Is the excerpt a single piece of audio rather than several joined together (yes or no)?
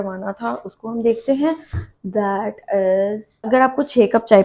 no